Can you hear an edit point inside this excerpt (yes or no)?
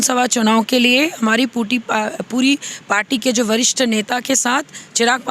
no